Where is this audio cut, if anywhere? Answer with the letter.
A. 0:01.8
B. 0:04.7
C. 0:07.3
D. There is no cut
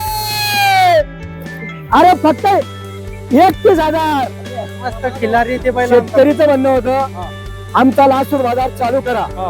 B